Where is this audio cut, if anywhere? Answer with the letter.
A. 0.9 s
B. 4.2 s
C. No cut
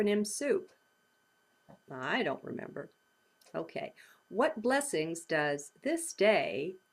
A